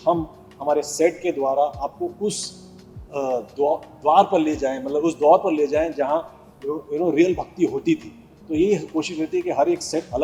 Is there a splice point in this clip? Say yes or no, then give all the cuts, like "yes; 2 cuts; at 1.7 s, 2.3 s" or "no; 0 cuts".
no; 0 cuts